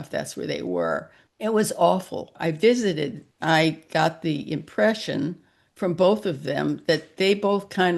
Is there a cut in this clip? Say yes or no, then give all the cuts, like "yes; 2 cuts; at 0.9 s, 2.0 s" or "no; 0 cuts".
yes; 3 cuts; at 1.2 s, 2.3 s, 3.3 s